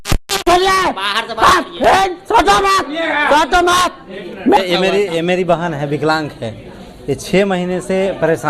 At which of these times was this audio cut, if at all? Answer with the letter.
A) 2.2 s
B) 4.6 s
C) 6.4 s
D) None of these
B